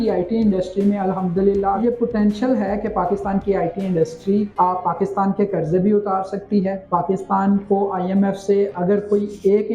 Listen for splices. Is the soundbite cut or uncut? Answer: cut